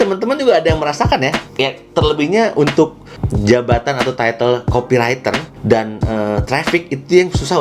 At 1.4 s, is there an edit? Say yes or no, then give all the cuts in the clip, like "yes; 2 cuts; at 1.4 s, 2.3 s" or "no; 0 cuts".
yes; 1 cut; at 1.4 s